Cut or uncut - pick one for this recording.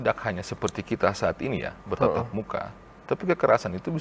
uncut